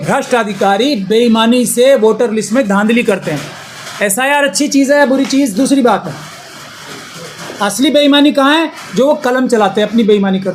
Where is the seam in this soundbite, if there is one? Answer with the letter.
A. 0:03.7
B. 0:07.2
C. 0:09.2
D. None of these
D